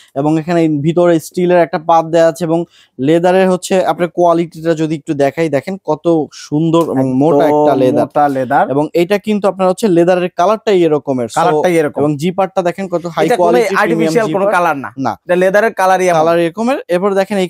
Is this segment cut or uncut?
uncut